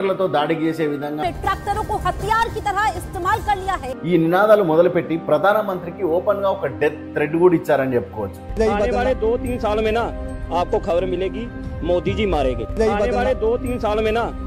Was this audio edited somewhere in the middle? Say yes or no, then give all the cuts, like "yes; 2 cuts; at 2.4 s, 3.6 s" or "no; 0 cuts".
yes; 2 cuts; at 1.2 s, 3.9 s